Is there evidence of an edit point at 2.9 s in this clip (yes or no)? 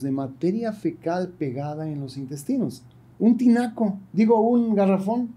no